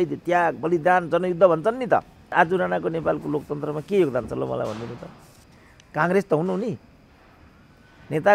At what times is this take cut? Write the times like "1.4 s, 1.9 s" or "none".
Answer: 2.2 s